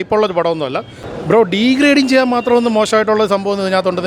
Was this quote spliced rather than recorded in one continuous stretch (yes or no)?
yes